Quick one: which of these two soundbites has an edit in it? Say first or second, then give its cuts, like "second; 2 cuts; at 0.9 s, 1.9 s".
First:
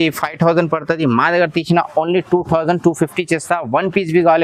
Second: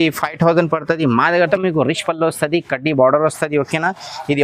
second; 1 cut; at 1.5 s